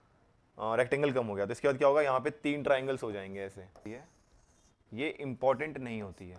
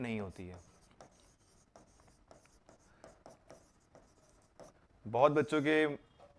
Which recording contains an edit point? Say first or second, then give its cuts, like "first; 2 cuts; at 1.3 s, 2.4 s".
first; 1 cut; at 3.9 s